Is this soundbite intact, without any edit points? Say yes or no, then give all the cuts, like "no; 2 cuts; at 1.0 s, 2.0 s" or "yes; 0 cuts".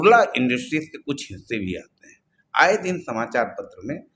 yes; 0 cuts